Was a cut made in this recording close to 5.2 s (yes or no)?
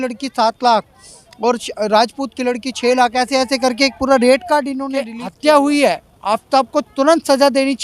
yes